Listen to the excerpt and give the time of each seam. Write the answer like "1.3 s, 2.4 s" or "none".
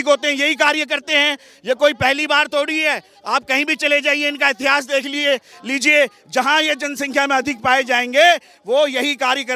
none